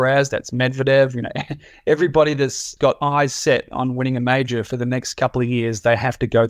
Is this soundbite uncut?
no; 1 cut; at 2.7 s

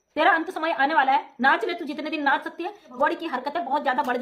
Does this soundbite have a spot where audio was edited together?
yes; 1 cut; at 2.9 s

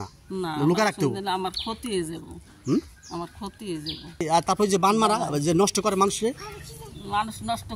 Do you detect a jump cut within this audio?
yes; 1 cut; at 4.2 s

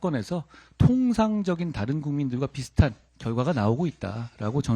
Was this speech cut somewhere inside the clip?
yes; 1 cut; at 3.1 s

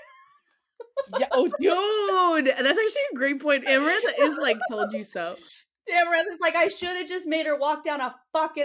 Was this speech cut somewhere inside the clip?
no; 0 cuts

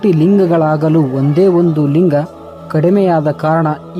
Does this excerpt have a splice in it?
no; 0 cuts

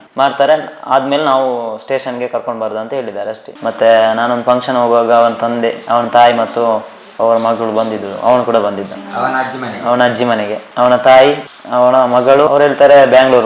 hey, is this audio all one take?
no; 2 cuts; at 3.5 s, 12.5 s

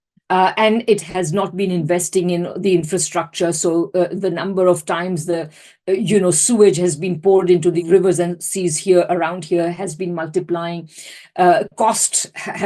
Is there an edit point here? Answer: yes; 1 cut; at 7.8 s

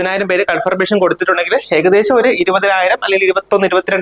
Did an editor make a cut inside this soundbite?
no; 0 cuts

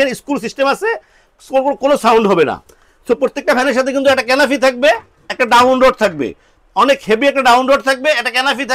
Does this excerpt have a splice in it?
no; 0 cuts

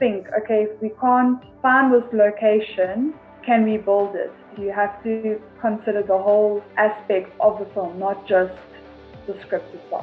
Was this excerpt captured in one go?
no; 4 cuts; at 1.5 s, 3.3 s, 4.5 s, 6.7 s

